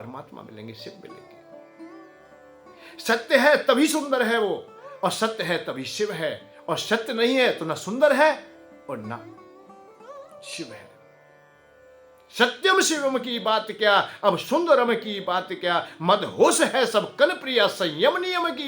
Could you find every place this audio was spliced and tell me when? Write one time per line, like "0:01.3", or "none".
0:01.3
0:02.7